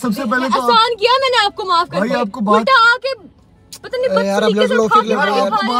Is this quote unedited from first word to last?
yes; 0 cuts

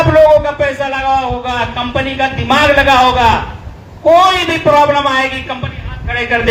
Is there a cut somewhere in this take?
no; 0 cuts

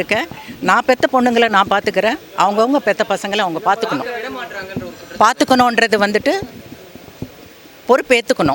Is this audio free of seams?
yes; 0 cuts

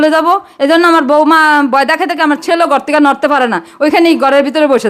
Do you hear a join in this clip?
no; 0 cuts

